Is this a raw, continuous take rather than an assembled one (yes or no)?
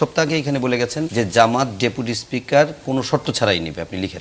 no